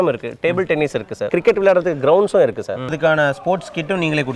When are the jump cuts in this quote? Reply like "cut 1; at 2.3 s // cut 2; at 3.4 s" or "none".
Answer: cut 1; at 1.3 s // cut 2; at 2.9 s